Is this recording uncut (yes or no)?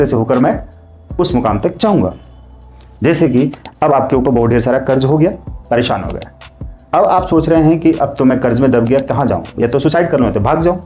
yes